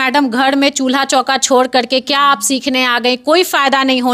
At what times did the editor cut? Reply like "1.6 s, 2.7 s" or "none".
none